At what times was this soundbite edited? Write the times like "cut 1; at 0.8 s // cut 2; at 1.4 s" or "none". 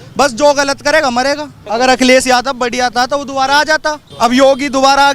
cut 1; at 1.5 s // cut 2; at 4.0 s

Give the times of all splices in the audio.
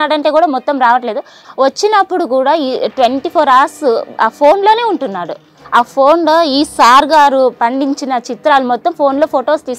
cut 1; at 1.4 s // cut 2; at 5.6 s

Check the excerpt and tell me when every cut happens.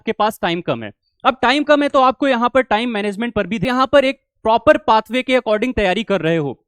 cut 1; at 3.6 s

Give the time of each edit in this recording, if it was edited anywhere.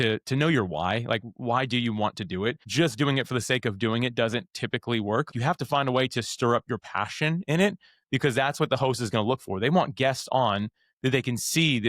cut 1; at 2.6 s // cut 2; at 5.3 s

